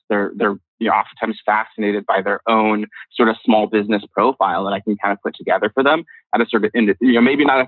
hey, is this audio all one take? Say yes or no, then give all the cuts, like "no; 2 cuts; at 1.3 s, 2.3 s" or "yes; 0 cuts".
yes; 0 cuts